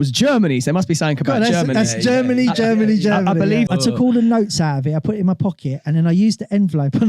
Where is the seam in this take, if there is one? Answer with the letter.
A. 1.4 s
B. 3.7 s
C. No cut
B